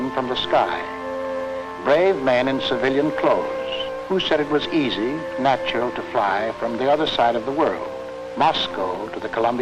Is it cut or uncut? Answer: cut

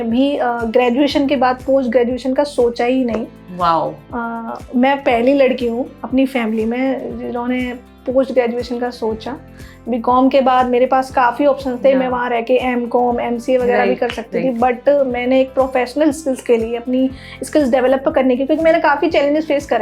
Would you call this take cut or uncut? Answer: uncut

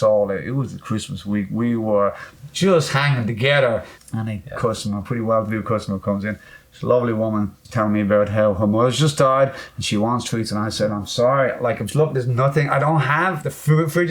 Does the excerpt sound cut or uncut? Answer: cut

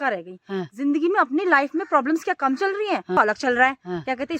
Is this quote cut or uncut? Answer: cut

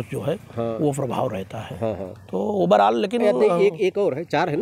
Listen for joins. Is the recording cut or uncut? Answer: uncut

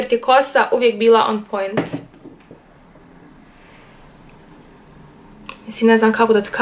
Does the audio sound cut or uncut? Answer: uncut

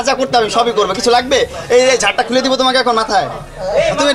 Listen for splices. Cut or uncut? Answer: uncut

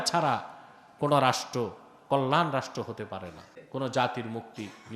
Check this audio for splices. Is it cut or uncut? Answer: cut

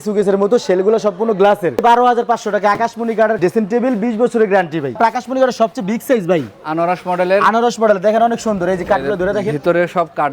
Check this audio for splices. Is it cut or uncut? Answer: cut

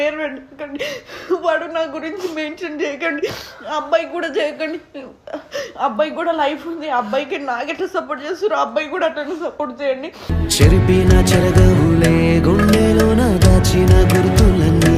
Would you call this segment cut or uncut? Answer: uncut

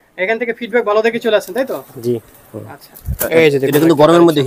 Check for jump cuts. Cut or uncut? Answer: cut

